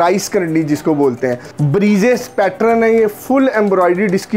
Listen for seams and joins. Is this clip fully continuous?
no; 1 cut; at 1.5 s

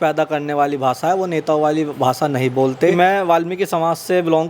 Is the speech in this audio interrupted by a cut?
yes; 1 cut; at 2.9 s

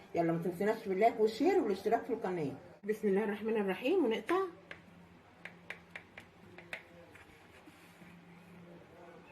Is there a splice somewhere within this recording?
yes; 1 cut; at 2.9 s

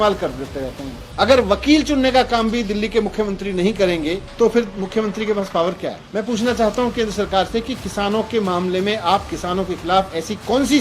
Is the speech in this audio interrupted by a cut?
yes; 2 cuts; at 1.0 s, 6.0 s

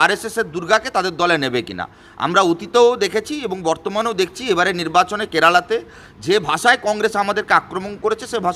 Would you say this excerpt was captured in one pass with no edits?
yes; 0 cuts

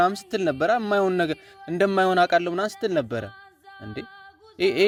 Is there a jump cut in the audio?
no; 0 cuts

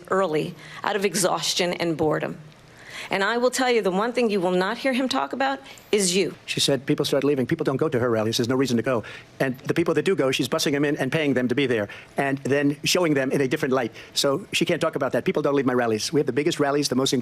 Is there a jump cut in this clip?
yes; 2 cuts; at 6.5 s, 16.0 s

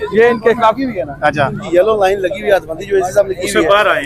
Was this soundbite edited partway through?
yes; 1 cut; at 1.6 s

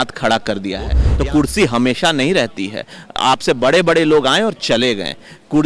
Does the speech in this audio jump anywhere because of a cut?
yes; 1 cut; at 1.0 s

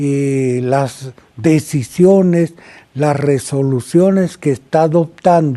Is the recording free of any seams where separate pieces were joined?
yes; 0 cuts

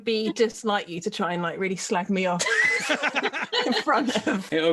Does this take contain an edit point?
no; 0 cuts

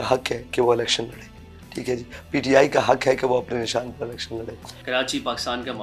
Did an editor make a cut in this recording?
no; 0 cuts

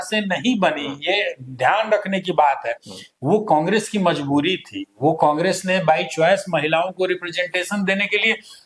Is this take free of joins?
yes; 0 cuts

